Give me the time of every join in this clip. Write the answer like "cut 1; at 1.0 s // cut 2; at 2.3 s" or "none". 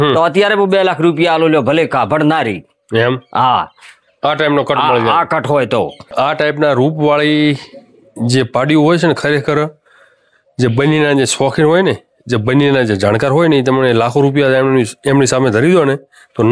cut 1; at 6.1 s

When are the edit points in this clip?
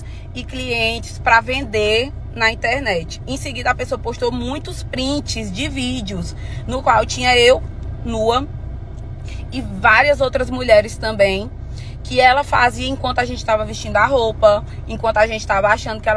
none

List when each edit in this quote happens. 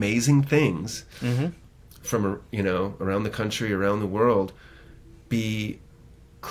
cut 1; at 1.6 s

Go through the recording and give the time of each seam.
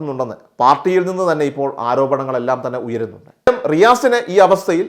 cut 1; at 3.5 s

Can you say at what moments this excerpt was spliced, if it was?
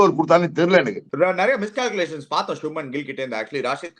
cut 1; at 1.0 s

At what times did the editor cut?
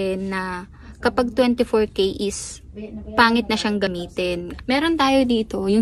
cut 1; at 4.0 s

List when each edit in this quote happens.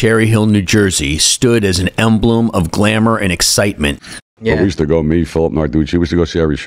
cut 1; at 4.1 s

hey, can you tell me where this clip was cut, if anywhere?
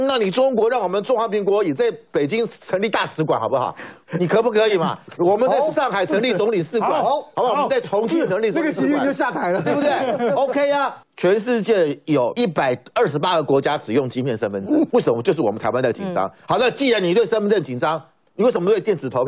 cut 1; at 11.0 s // cut 2; at 12.3 s // cut 3; at 14.9 s

